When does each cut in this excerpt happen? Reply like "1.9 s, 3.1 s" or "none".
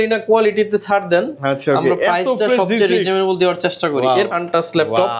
4.3 s